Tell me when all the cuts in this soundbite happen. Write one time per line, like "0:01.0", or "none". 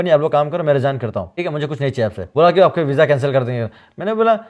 0:01.3
0:02.2